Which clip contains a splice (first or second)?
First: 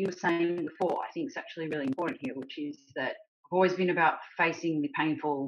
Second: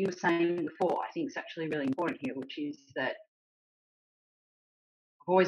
first